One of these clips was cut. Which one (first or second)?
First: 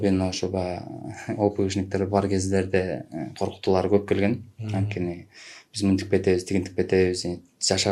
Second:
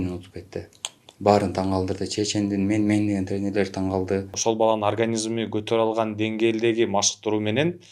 second